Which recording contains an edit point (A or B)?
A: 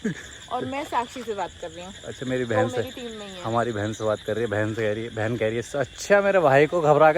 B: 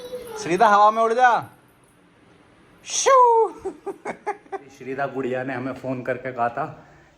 B